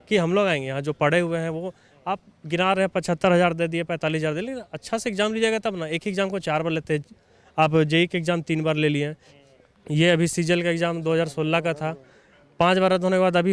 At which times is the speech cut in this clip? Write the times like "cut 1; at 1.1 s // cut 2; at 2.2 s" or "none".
none